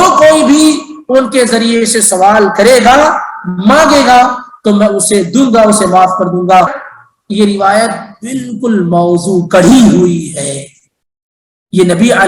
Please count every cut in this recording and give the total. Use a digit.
1